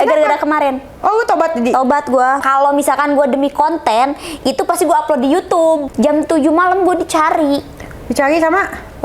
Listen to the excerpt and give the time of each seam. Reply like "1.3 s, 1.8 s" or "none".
2.4 s, 5.9 s